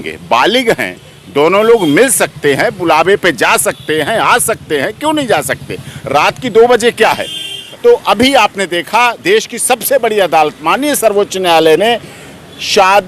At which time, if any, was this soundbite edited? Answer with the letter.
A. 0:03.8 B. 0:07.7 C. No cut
B